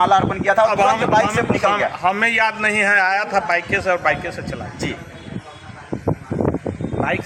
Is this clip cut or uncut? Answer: uncut